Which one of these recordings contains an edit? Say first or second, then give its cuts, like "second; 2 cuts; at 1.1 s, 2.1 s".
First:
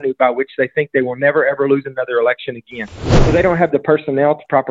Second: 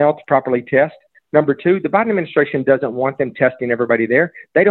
first; 1 cut; at 3.1 s